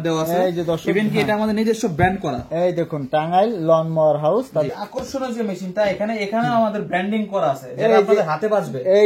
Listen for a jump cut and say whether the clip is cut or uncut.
cut